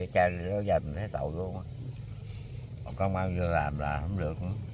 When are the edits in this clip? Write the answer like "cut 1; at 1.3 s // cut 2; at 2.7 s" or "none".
none